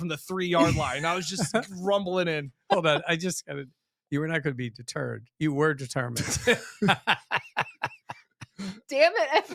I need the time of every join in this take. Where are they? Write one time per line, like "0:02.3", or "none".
none